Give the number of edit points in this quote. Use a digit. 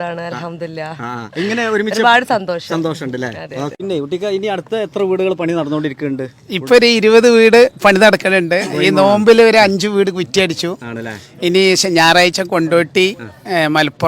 1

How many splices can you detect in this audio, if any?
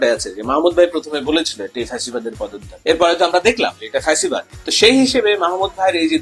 2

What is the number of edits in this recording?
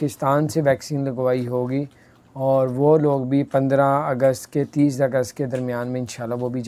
0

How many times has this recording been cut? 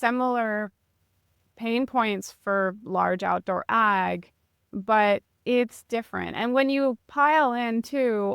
1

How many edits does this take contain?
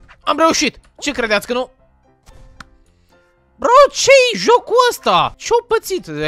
1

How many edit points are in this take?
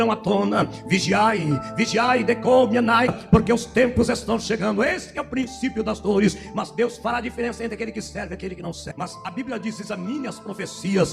2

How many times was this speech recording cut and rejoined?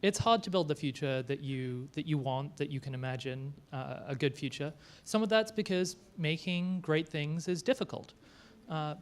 1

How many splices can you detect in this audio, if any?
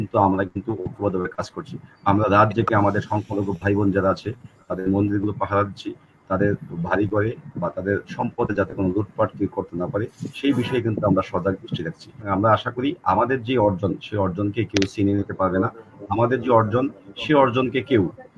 1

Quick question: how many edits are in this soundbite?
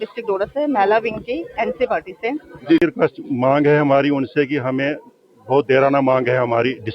1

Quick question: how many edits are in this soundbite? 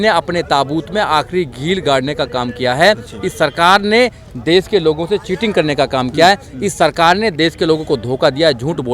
0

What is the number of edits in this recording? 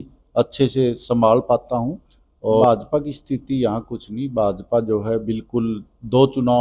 1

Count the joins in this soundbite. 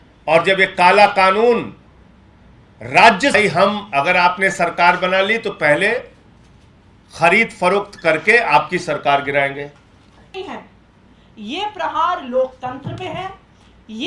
2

